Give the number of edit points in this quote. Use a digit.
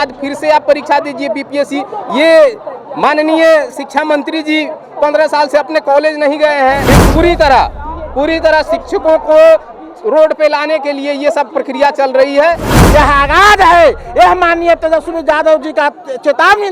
2